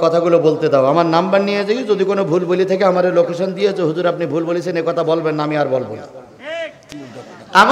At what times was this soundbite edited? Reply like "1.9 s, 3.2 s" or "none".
6.8 s